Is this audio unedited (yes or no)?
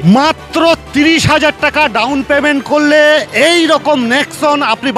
yes